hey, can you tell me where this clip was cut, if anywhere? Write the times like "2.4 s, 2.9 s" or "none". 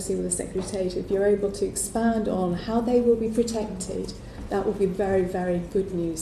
none